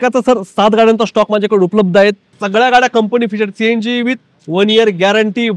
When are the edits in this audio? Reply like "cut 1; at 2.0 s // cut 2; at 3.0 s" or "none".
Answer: cut 1; at 2.3 s